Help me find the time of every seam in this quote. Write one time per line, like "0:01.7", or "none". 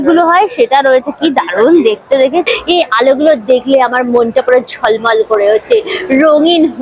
0:02.5